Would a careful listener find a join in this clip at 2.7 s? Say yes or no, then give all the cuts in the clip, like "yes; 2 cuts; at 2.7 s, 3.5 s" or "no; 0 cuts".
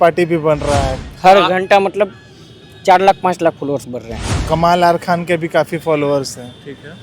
no; 2 cuts; at 0.9 s, 4.3 s